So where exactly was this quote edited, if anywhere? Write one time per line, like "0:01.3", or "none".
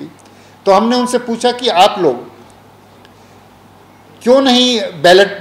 none